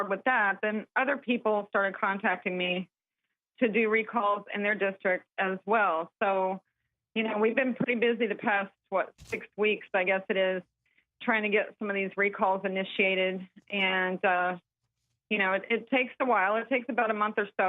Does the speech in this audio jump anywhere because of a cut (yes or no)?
yes